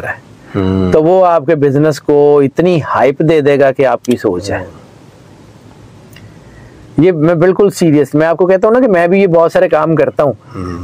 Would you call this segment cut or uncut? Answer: uncut